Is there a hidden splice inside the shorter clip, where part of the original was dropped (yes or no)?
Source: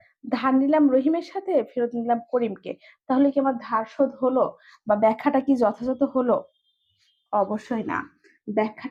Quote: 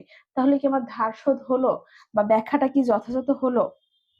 no